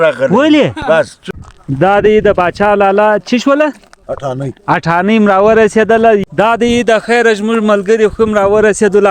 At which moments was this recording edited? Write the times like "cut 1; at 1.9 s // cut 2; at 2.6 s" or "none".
cut 1; at 1.2 s // cut 2; at 6.2 s